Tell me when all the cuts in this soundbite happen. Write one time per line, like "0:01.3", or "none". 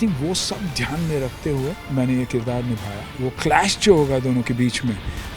0:01.8
0:03.2